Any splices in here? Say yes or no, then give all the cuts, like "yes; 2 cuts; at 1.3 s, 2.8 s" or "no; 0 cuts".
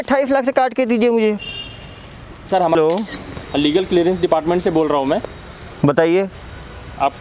yes; 1 cut; at 2.7 s